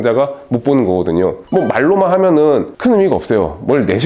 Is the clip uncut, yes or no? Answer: yes